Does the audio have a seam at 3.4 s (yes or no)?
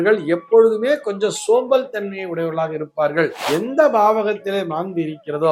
yes